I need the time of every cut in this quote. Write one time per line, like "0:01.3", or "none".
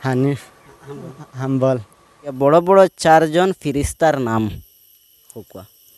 0:02.4